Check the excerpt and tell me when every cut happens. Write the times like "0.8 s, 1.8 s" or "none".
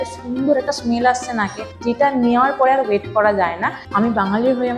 3.8 s